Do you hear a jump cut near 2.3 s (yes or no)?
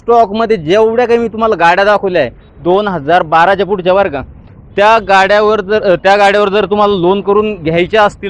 no